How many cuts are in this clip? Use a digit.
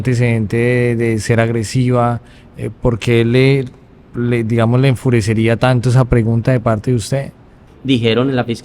1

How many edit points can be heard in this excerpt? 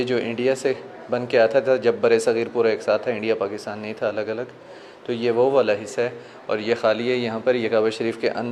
0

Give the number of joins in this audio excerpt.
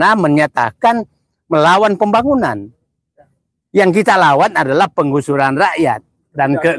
0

